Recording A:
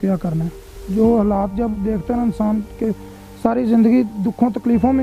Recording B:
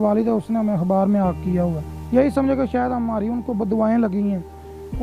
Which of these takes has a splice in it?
B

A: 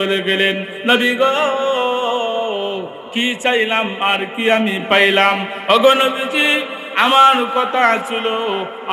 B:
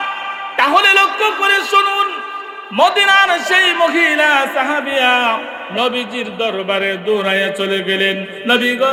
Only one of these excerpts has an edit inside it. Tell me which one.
A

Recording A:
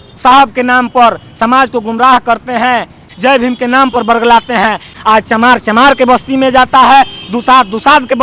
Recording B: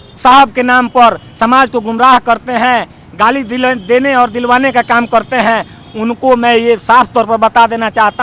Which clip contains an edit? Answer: A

